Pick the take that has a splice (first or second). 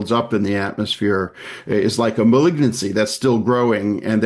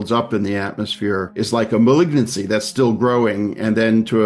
second